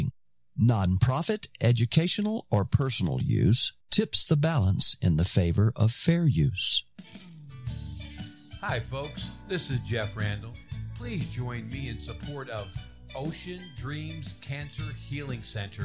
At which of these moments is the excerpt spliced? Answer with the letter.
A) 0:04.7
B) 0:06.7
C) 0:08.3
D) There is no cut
B